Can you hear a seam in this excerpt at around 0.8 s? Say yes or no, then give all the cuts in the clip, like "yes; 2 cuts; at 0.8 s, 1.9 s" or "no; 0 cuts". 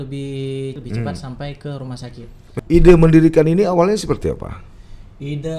yes; 2 cuts; at 0.8 s, 2.6 s